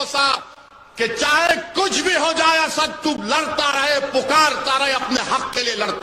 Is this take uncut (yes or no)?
yes